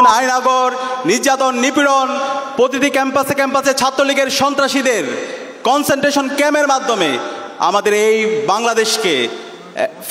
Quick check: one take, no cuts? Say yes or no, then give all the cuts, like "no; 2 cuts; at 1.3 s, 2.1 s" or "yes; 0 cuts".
yes; 0 cuts